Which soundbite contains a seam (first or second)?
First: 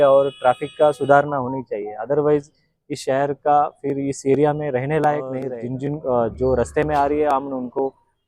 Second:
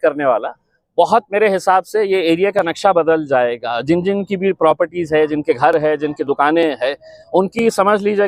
first